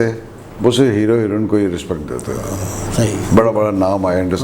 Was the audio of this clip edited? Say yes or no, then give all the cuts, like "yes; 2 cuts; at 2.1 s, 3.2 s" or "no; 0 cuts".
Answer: no; 0 cuts